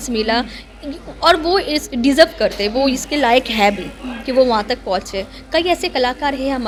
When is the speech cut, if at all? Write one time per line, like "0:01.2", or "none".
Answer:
none